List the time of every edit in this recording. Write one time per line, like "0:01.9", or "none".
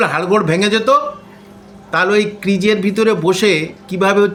none